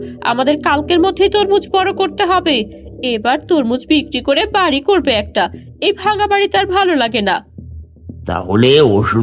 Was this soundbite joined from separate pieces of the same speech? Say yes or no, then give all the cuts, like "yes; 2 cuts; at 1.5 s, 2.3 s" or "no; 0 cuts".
no; 0 cuts